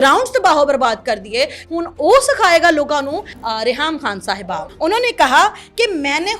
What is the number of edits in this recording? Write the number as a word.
three